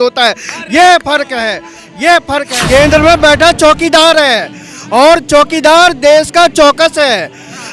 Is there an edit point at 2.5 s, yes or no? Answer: yes